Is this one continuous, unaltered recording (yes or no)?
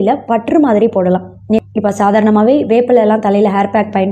no